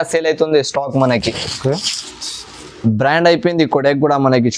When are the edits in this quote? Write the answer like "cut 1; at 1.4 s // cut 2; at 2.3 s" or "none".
none